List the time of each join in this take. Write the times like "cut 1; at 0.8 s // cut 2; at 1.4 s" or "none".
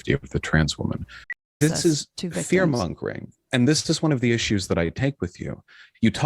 cut 1; at 1.4 s